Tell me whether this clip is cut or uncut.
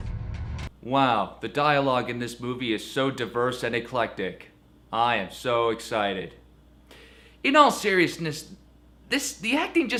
uncut